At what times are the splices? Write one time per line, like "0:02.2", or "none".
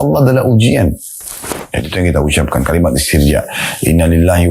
0:01.6